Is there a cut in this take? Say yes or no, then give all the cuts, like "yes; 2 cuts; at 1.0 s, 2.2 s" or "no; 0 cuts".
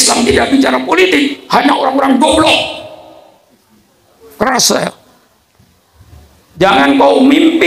yes; 1 cut; at 6.4 s